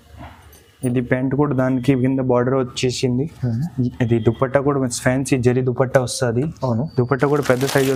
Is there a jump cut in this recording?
no; 0 cuts

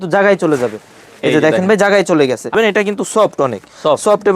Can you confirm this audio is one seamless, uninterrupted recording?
no; 1 cut; at 2.5 s

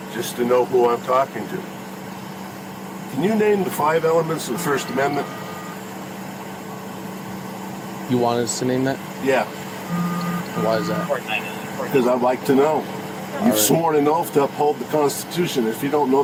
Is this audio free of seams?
yes; 0 cuts

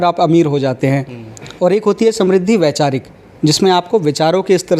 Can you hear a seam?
no; 0 cuts

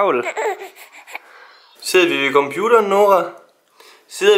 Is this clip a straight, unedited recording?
no; 1 cut; at 1.8 s

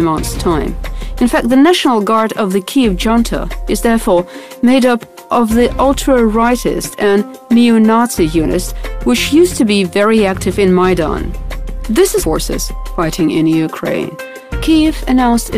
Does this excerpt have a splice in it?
no; 0 cuts

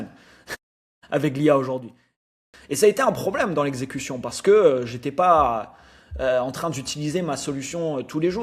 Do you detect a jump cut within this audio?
yes; 1 cut; at 2.3 s

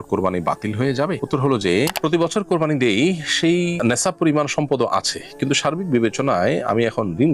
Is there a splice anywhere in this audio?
yes; 1 cut; at 1.9 s

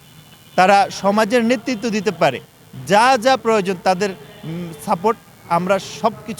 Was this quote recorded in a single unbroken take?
yes; 0 cuts

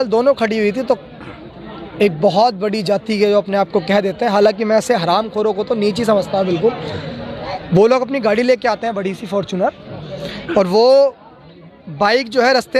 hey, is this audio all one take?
yes; 0 cuts

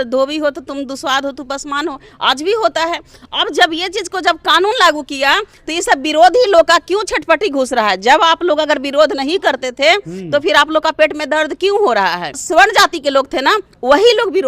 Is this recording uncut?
no; 1 cut; at 12.4 s

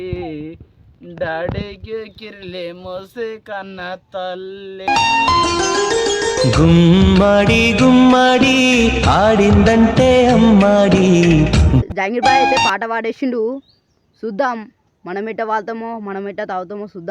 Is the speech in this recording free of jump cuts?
yes; 0 cuts

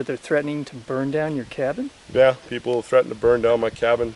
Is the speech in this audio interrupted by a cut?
no; 0 cuts

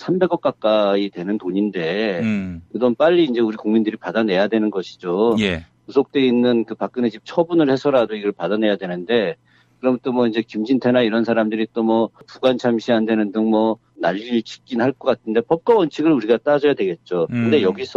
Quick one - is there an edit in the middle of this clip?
no; 0 cuts

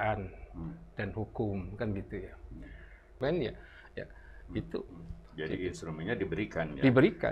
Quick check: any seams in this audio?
yes; 1 cut; at 3.2 s

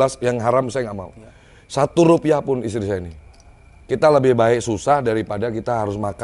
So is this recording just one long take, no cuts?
yes; 0 cuts

